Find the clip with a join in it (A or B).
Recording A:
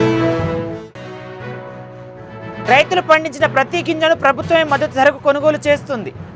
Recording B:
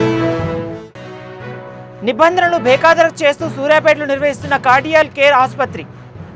B